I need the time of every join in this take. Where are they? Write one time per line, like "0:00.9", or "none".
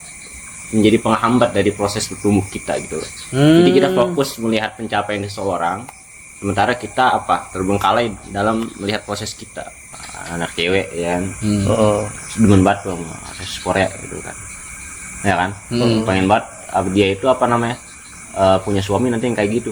0:09.9